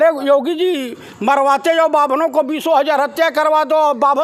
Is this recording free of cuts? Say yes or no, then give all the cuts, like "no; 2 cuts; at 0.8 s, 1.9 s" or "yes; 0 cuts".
yes; 0 cuts